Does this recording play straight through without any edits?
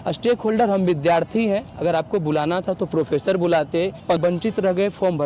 no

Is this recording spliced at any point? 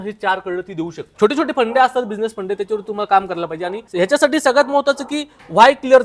yes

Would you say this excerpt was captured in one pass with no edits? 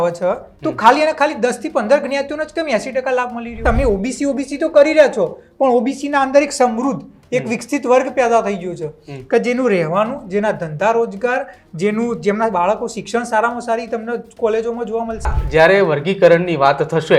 no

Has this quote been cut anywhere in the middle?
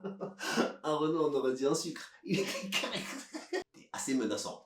yes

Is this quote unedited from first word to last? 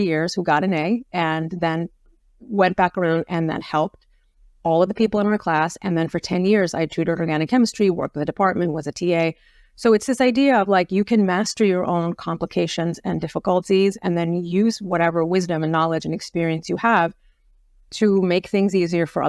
yes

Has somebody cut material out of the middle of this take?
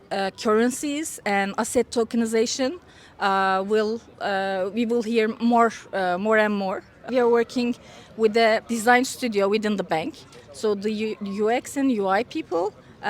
yes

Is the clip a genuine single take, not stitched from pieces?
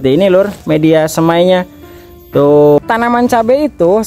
no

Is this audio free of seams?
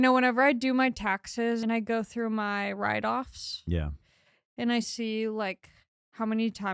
no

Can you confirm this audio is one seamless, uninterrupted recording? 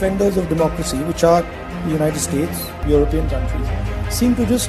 yes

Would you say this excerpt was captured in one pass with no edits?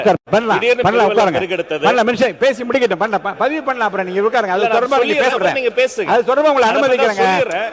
yes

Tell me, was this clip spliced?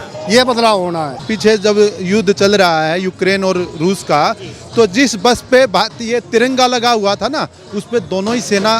yes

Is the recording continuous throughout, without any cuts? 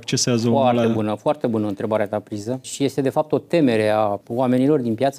no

